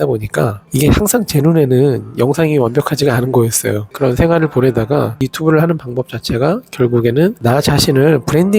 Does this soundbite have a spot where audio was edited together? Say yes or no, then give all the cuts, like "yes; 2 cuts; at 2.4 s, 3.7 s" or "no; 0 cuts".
no; 0 cuts